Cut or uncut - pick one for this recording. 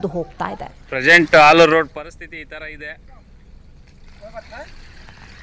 uncut